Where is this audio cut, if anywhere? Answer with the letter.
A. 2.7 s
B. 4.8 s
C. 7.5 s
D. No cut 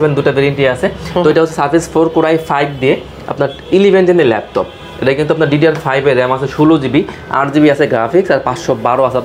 D